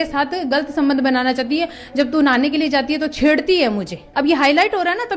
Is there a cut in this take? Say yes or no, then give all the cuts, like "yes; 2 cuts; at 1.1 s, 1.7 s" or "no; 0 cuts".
yes; 1 cut; at 4.0 s